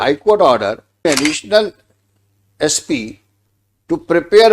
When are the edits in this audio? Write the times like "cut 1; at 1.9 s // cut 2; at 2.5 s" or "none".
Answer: cut 1; at 1.0 s

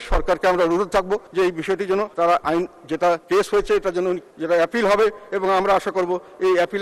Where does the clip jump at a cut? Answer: cut 1; at 1.3 s // cut 2; at 2.1 s // cut 3; at 3.2 s // cut 4; at 4.3 s

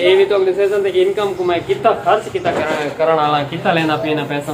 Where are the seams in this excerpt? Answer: none

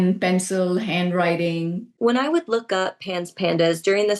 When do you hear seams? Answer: cut 1; at 1.9 s

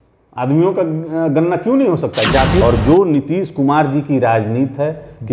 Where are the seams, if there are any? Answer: cut 1; at 2.6 s

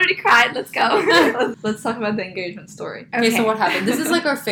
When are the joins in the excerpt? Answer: cut 1; at 1.5 s

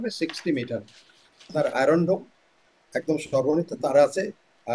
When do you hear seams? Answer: cut 1; at 1.5 s

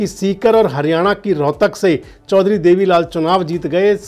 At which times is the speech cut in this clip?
none

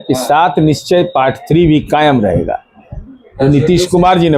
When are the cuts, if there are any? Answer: none

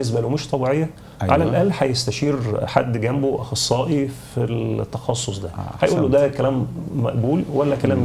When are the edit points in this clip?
none

